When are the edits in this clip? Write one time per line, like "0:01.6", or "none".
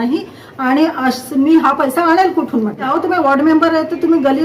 0:02.9